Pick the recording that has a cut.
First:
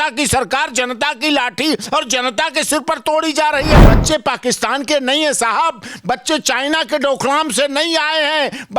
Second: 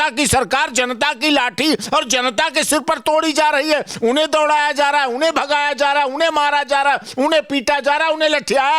first; 1 cut; at 3.8 s

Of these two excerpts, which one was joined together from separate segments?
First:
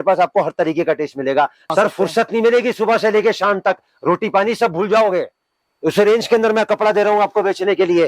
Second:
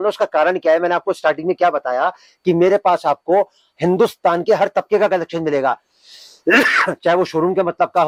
first; 1 cut; at 1.7 s

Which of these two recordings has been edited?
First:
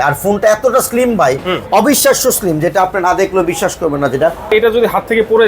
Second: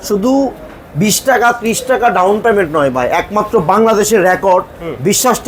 first; 1 cut; at 4.5 s

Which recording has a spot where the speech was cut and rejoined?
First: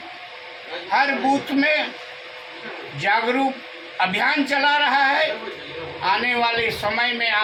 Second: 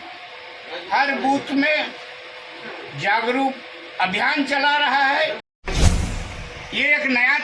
second; 1 cut; at 6.0 s

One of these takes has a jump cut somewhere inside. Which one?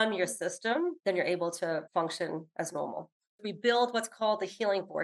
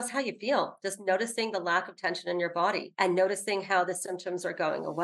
first; 3 cuts; at 1.0 s, 2.0 s, 3.4 s

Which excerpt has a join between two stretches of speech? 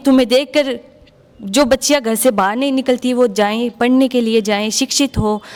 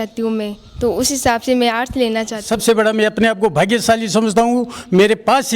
second; 1 cut; at 2.5 s

